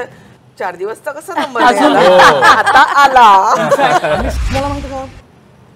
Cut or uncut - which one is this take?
cut